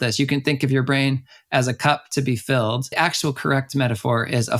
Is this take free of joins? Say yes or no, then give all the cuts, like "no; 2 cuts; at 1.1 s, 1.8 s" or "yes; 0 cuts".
no; 1 cut; at 2.9 s